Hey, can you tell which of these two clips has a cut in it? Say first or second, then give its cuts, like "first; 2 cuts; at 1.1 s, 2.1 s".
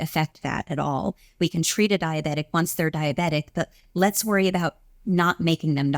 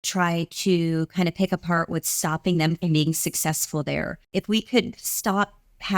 second; 1 cut; at 4.2 s